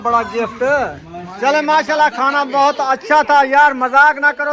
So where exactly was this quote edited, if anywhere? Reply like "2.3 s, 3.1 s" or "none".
1.3 s